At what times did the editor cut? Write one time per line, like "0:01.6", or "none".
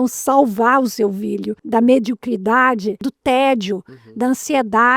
0:01.6
0:03.1